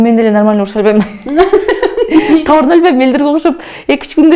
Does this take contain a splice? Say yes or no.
no